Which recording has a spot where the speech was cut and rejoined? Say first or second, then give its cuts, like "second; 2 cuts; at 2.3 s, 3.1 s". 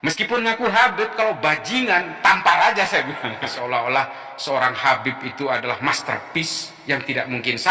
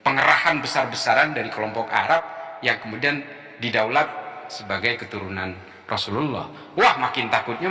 first; 1 cut; at 3.5 s